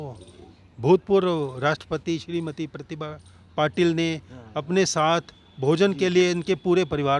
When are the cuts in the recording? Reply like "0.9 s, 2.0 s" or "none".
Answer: none

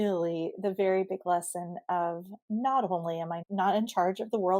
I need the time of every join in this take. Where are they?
3.4 s

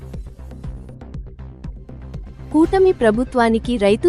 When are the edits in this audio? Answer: 1.0 s

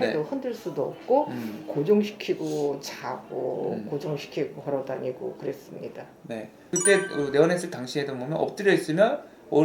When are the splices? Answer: 6.6 s

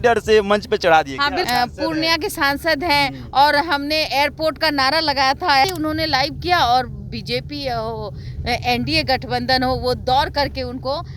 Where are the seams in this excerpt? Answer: 1.5 s, 5.6 s

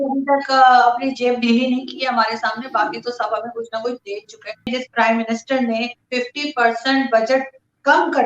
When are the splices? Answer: 4.7 s

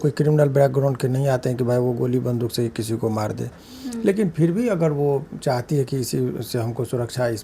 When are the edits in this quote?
none

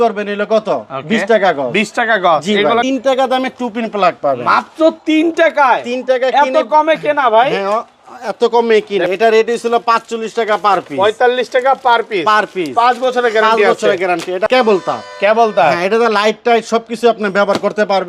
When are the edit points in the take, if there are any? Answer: 2.8 s, 9.1 s, 14.5 s

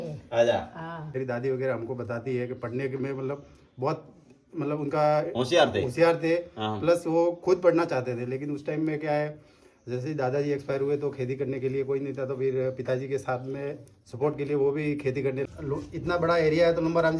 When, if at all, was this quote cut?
1.2 s, 15.5 s

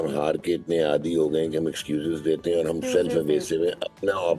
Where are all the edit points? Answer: none

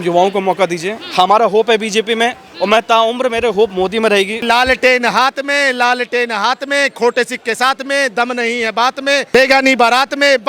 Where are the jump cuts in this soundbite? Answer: 4.4 s

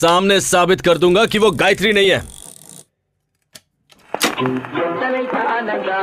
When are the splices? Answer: none

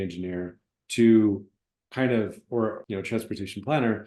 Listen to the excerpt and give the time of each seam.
2.8 s

